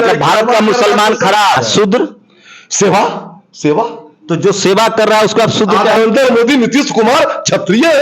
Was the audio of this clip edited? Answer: yes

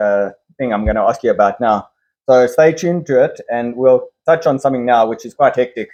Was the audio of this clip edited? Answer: no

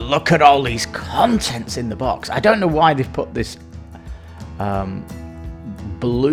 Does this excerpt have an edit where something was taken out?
no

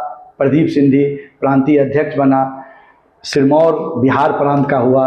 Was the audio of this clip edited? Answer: no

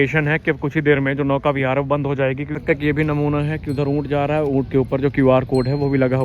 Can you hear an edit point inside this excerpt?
yes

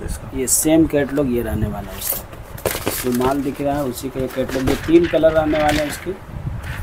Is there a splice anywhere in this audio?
no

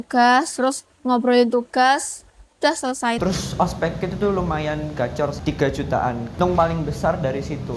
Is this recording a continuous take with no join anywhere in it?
no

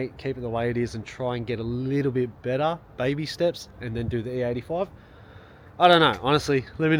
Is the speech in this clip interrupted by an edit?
no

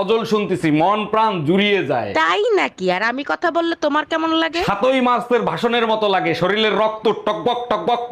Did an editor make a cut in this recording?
no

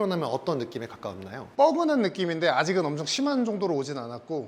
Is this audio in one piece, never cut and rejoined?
yes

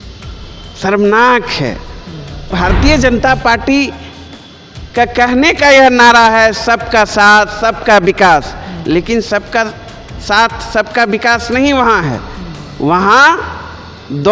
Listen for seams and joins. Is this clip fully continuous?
no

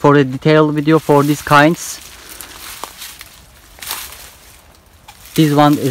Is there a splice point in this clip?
no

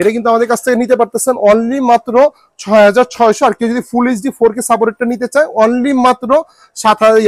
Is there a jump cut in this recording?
no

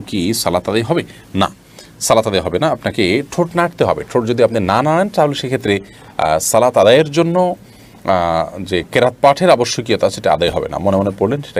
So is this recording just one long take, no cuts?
yes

